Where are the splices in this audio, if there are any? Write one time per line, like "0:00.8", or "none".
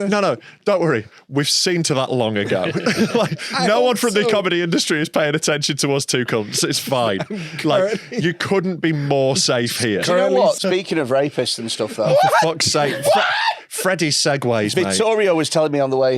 0:10.6